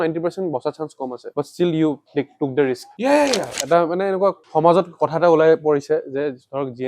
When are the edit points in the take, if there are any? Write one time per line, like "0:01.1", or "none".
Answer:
0:03.5